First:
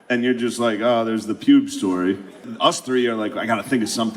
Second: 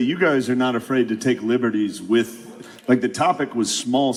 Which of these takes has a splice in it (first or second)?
first